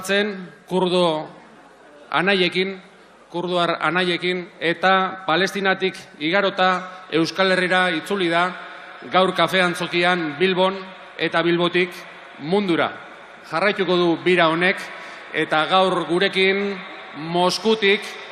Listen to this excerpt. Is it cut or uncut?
uncut